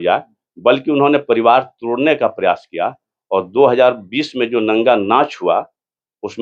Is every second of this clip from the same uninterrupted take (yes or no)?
yes